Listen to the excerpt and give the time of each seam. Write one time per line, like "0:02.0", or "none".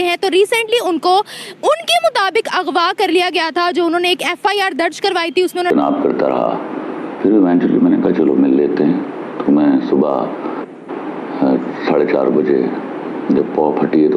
0:05.7